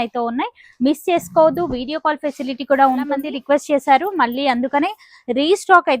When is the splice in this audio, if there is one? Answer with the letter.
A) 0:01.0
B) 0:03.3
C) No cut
B